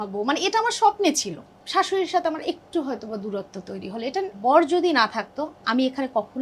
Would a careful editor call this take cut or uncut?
cut